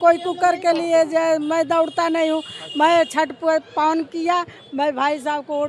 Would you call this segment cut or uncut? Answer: uncut